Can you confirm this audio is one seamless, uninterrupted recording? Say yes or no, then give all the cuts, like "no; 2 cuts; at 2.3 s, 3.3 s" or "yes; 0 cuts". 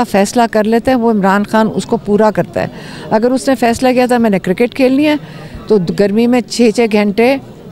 yes; 0 cuts